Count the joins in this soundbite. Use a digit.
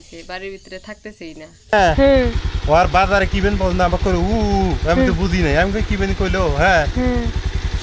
1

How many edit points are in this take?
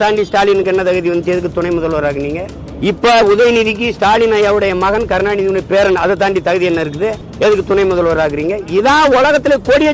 2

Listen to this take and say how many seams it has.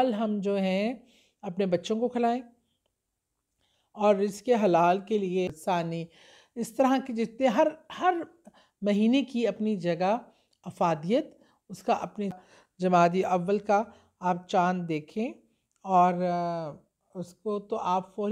2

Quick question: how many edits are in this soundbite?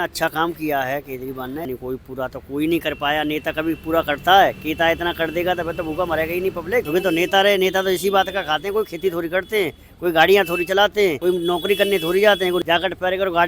4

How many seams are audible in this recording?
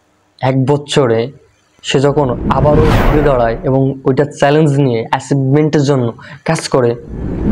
0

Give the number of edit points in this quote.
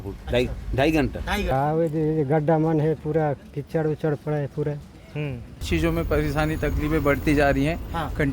2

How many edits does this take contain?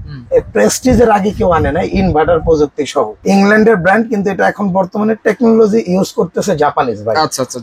1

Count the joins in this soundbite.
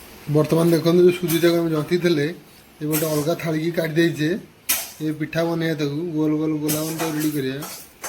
0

